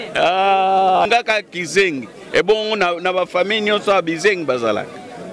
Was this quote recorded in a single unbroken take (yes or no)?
no